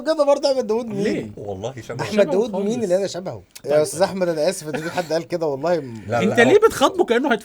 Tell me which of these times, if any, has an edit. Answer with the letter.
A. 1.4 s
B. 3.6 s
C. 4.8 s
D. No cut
B